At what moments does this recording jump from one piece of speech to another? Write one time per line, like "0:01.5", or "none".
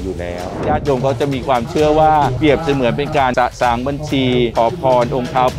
0:00.7
0:02.3
0:03.3
0:04.5